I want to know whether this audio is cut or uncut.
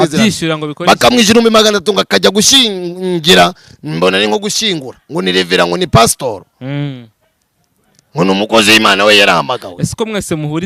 uncut